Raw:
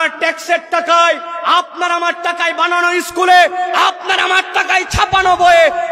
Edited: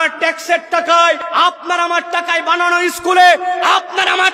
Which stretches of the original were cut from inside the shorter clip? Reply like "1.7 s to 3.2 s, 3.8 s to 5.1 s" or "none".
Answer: 1.2 s to 1.4 s